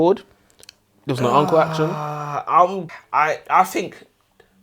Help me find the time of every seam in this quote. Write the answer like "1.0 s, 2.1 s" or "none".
2.8 s